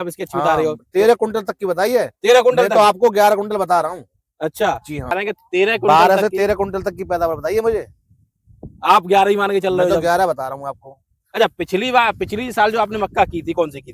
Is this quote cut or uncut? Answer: cut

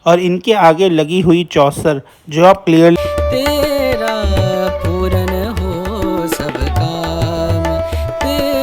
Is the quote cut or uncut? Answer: cut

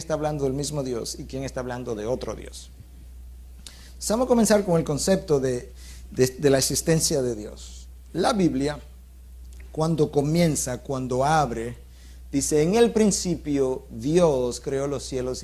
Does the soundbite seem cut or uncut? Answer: uncut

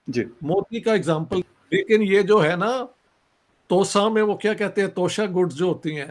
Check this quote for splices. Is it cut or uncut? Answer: uncut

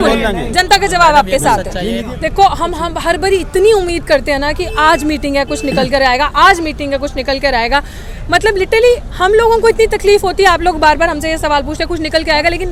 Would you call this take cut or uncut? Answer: uncut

